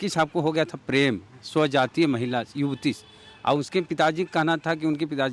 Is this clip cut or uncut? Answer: uncut